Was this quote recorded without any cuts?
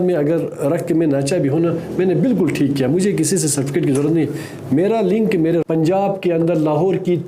no; 1 cut; at 5.6 s

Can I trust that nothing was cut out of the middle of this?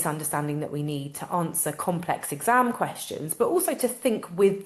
yes; 0 cuts

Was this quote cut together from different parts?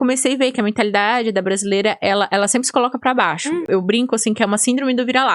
yes; 1 cut; at 3.6 s

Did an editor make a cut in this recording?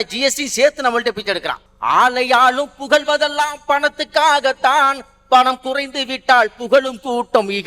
yes; 1 cut; at 1.6 s

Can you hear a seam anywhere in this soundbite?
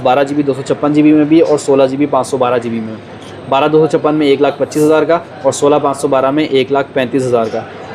no; 0 cuts

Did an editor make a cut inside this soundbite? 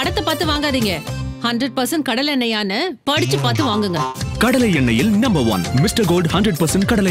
no; 0 cuts

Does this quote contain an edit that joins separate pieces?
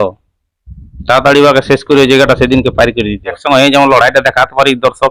yes; 1 cut; at 3.4 s

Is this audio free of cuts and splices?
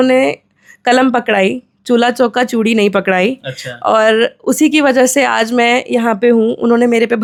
yes; 0 cuts

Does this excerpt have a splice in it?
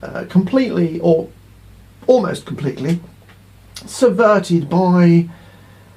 yes; 1 cut; at 1.4 s

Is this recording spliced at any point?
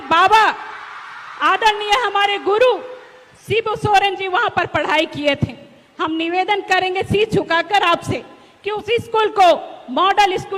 no; 0 cuts

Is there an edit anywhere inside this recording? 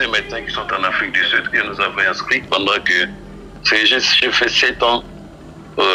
no; 0 cuts

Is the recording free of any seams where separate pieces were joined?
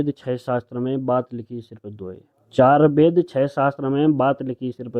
yes; 0 cuts

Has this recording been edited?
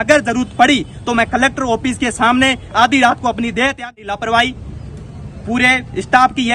yes; 1 cut; at 3.9 s

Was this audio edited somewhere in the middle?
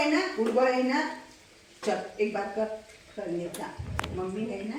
no; 0 cuts

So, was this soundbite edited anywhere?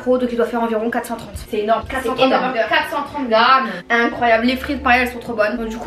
no; 0 cuts

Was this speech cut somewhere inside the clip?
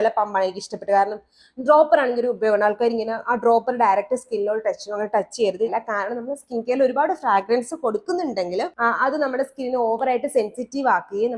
yes; 2 cuts; at 5.7 s, 8.7 s

